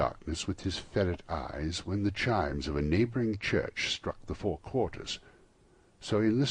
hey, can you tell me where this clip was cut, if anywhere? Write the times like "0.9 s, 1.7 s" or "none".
1.2 s